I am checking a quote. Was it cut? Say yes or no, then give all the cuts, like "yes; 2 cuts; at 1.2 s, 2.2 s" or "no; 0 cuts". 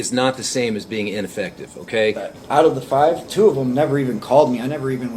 yes; 1 cut; at 2.3 s